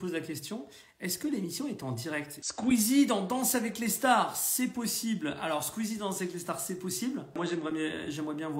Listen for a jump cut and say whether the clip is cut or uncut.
cut